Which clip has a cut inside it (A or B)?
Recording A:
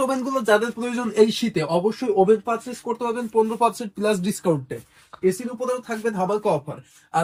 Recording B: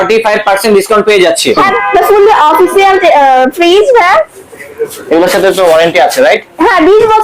B